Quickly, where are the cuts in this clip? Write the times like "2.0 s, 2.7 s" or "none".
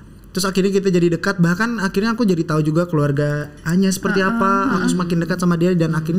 none